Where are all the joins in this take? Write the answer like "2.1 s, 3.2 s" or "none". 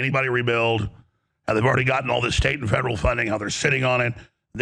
none